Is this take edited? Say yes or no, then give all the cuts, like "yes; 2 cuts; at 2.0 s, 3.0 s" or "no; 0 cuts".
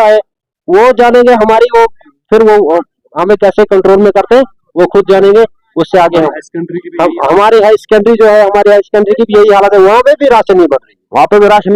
no; 0 cuts